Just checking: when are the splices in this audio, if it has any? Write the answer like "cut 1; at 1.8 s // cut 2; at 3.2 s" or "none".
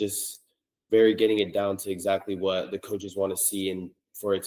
none